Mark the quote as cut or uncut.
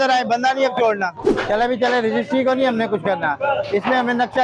cut